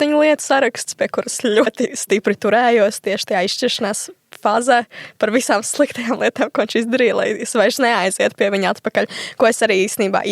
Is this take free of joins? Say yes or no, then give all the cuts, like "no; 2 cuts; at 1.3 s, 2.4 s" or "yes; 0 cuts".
no; 1 cut; at 1.7 s